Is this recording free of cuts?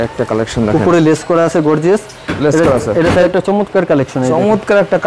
no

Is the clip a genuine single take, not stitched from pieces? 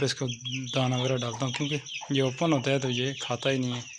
yes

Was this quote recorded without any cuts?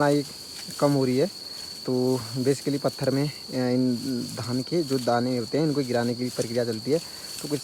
yes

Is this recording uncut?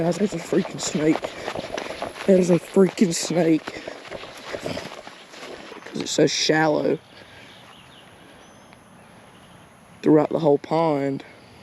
no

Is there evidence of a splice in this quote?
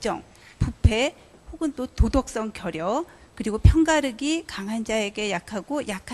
yes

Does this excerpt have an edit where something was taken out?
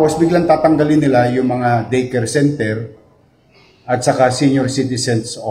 no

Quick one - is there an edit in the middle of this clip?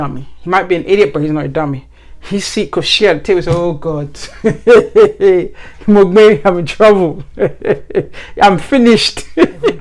no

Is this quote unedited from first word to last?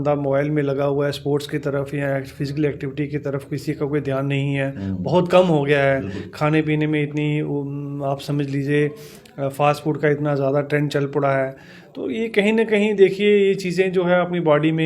yes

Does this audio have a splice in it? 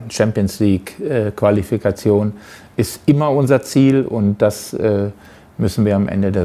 no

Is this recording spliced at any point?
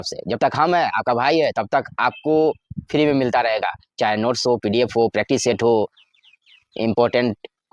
no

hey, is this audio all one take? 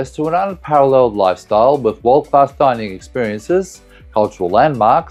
yes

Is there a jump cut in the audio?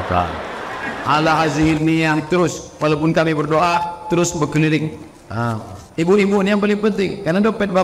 no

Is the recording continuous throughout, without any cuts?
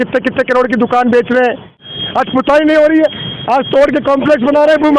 no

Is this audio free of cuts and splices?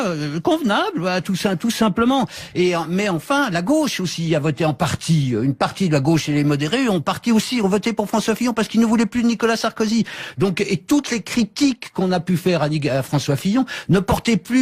yes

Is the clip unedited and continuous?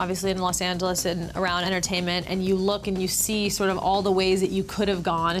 no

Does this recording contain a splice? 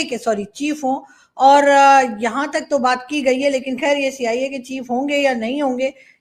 no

